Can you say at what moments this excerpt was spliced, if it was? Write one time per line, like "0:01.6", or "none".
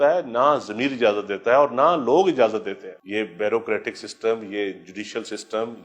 0:02.9

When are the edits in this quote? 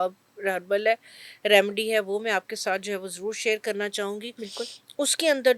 none

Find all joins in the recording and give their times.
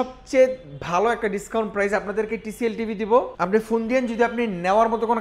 0:03.3

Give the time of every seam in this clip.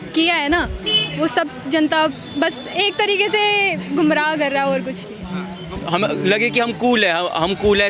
0:05.8

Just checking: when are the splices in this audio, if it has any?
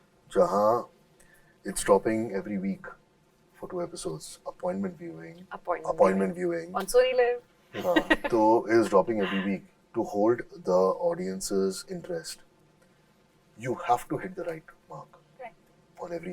none

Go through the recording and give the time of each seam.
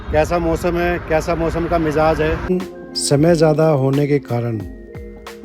0:02.5

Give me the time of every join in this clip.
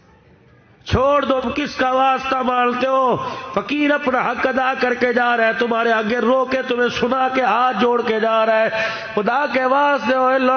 0:01.4

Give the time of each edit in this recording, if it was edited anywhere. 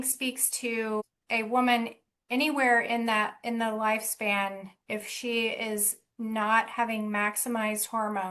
0:01.2

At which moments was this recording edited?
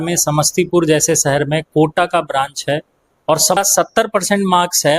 0:03.6

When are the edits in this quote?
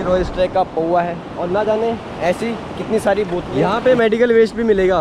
0:03.6

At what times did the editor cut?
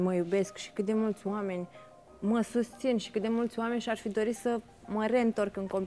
none

